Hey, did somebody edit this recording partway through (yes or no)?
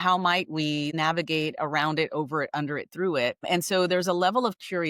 yes